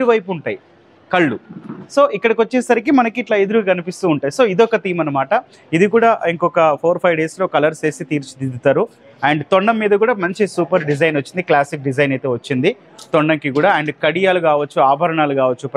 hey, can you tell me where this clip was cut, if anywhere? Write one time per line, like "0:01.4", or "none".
none